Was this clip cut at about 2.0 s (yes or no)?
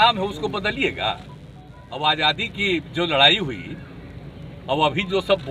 yes